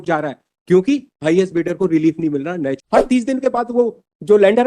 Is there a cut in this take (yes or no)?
yes